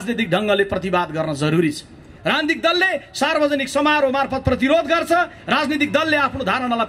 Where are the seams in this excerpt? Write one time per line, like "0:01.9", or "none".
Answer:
0:02.1